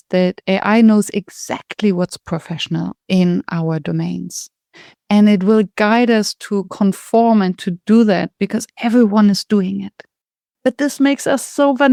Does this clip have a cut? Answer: no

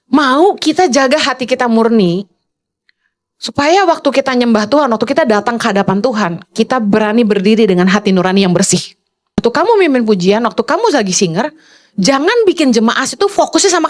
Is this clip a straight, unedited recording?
no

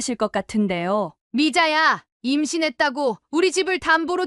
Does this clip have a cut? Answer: yes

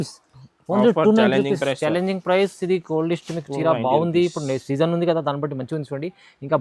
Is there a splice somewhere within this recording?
no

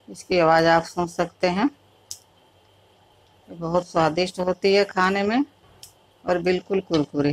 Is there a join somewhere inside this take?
no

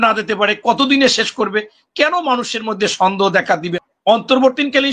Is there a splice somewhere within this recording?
yes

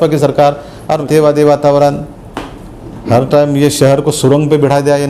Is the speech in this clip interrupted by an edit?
yes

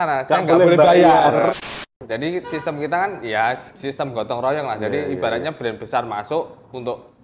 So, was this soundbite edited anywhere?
yes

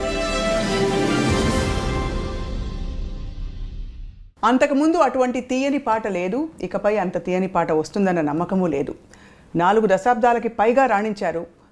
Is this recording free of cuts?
yes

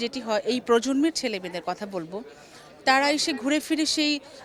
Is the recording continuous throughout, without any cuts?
yes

